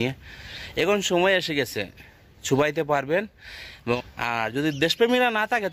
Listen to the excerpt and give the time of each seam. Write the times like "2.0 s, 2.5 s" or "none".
4.0 s